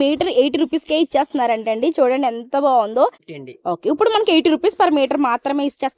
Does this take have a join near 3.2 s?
yes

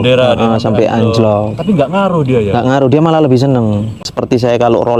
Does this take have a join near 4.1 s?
yes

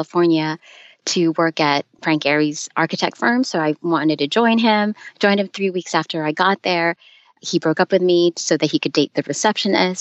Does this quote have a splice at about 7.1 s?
no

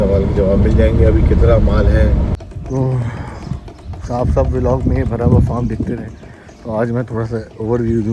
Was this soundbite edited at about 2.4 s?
yes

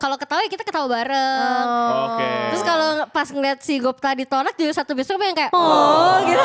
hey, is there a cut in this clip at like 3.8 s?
no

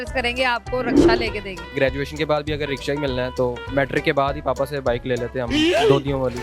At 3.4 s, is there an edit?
no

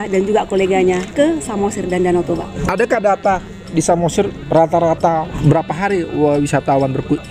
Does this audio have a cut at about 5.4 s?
yes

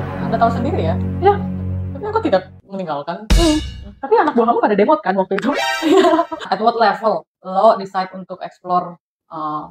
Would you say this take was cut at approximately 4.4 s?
no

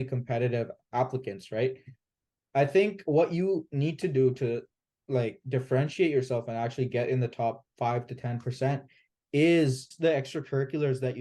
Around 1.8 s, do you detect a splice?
no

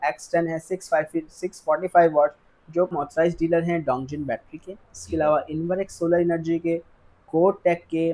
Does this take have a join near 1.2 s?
no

